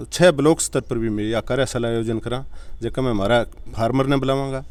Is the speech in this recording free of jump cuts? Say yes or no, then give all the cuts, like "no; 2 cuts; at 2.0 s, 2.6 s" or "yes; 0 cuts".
yes; 0 cuts